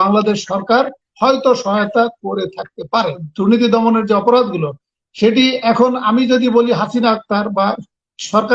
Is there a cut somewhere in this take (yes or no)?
yes